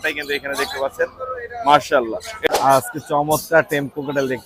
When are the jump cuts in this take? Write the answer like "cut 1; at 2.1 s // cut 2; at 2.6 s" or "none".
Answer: cut 1; at 2.5 s

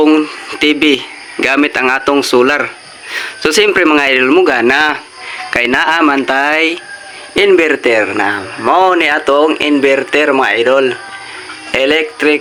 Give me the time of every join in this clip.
none

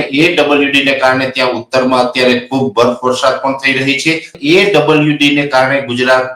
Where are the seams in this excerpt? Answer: cut 1; at 4.4 s

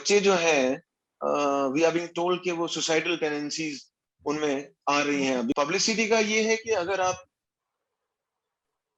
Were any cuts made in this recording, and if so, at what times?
cut 1; at 5.5 s

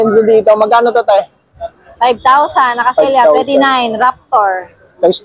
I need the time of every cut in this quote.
none

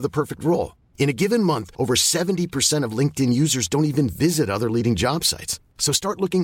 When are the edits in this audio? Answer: none

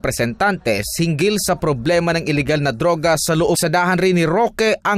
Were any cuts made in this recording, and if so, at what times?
none

